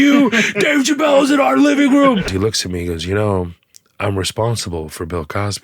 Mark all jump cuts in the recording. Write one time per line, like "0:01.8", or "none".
0:02.3